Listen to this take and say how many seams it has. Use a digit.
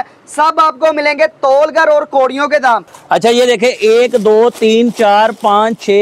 1